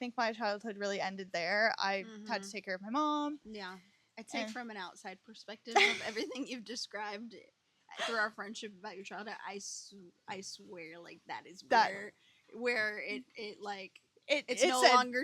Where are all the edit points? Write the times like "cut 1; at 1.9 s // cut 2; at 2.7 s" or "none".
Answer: none

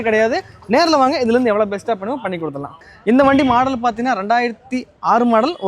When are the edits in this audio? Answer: cut 1; at 2.9 s

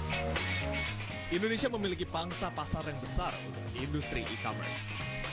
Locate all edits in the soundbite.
cut 1; at 2.5 s

